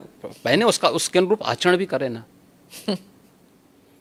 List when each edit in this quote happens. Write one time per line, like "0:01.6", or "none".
none